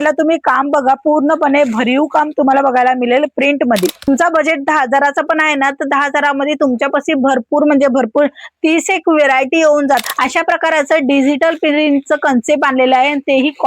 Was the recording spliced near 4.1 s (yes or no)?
yes